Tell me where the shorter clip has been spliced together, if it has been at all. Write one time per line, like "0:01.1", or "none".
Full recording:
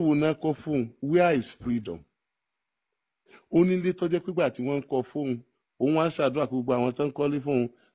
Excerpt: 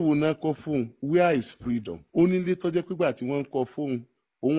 0:02.0